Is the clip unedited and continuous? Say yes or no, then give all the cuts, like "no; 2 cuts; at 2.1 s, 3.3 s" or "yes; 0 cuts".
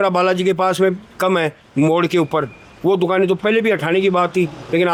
yes; 0 cuts